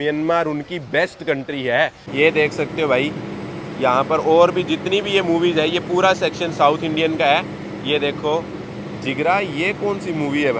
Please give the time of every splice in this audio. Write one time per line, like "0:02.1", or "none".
0:02.1